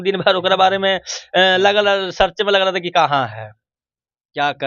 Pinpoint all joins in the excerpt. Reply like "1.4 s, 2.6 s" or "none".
none